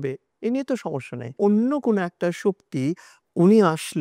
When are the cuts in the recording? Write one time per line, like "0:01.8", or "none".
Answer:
0:01.3
0:03.1